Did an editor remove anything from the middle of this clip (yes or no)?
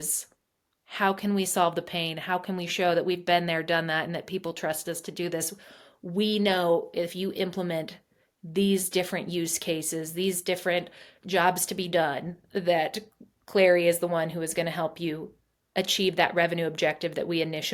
no